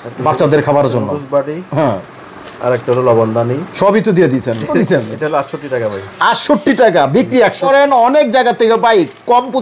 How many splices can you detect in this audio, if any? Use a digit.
2